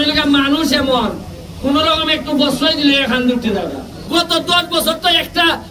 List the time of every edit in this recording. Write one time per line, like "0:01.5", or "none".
0:03.9